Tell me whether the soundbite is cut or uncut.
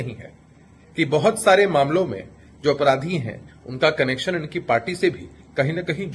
uncut